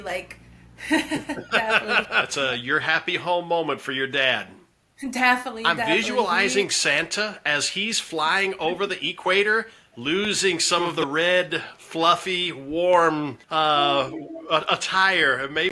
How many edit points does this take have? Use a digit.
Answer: 2